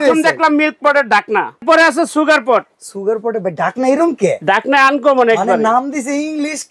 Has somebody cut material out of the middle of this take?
yes; 1 cut; at 1.6 s

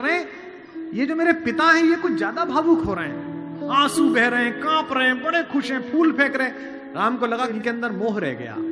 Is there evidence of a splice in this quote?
no; 0 cuts

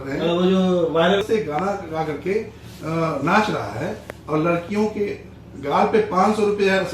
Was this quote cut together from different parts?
yes; 1 cut; at 1.2 s

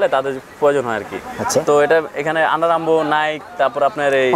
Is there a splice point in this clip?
no; 0 cuts

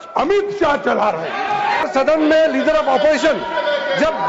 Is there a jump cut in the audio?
yes; 1 cut; at 1.8 s

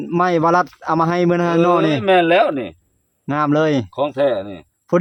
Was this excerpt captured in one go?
yes; 0 cuts

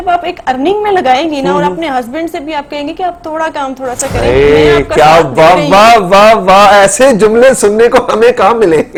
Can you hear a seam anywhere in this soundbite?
no; 0 cuts

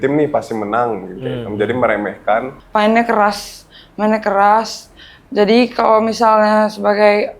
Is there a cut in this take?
yes; 1 cut; at 2.6 s

